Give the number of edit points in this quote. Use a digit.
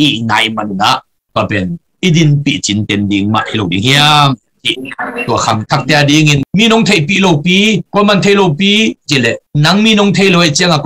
1